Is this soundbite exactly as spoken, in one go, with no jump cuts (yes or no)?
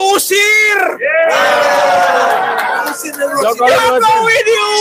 yes